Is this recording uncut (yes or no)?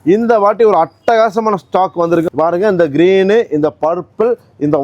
no